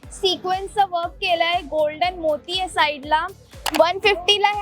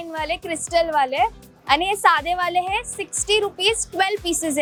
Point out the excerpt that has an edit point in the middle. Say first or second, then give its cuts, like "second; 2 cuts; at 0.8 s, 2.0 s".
first; 1 cut; at 3.6 s